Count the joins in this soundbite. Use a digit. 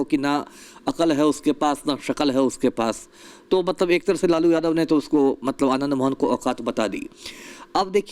0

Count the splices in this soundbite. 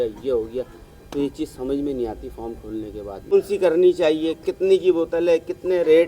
1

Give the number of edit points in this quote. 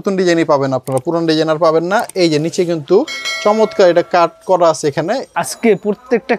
1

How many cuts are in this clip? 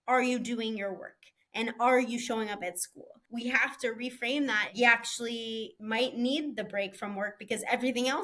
3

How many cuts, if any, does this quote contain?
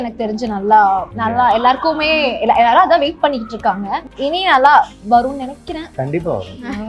3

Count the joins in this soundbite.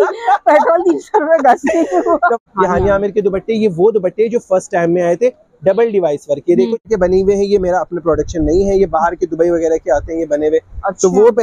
2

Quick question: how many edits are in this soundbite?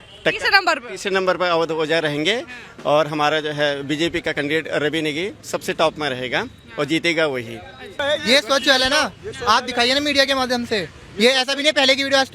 1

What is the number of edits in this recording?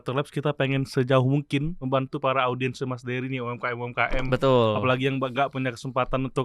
1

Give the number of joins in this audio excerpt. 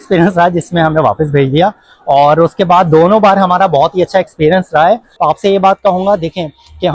1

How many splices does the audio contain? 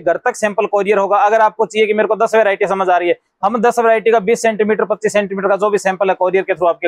0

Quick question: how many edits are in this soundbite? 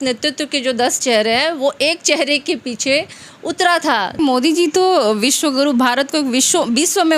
1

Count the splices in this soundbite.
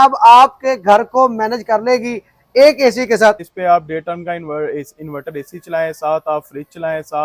1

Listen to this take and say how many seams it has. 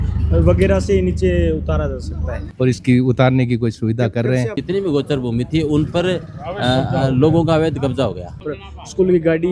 3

